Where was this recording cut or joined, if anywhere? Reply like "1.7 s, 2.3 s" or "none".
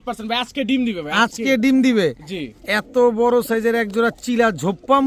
none